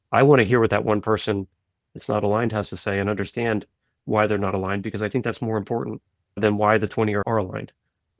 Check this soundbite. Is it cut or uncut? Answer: cut